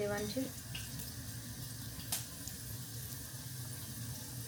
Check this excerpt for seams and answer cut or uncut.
uncut